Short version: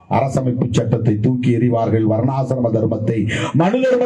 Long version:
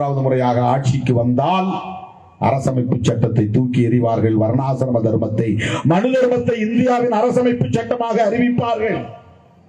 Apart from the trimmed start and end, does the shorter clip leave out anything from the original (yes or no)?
no